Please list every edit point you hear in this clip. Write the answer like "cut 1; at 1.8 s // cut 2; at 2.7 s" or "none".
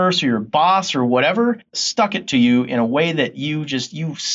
cut 1; at 1.7 s